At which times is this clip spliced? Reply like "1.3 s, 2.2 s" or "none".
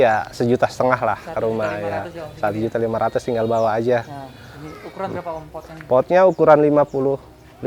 none